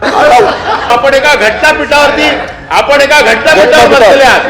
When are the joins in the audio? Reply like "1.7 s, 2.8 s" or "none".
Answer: 0.9 s